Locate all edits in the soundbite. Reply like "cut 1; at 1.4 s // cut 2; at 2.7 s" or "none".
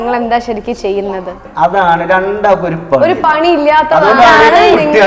cut 1; at 1.4 s